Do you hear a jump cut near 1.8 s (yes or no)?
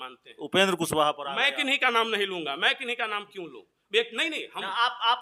no